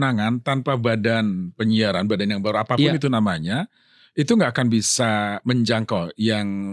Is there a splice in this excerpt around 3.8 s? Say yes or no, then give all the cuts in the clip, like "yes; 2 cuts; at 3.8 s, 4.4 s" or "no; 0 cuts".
no; 0 cuts